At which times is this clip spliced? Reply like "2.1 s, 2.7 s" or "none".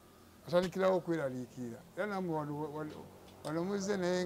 none